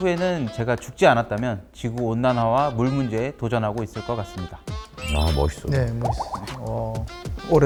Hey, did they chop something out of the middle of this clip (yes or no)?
no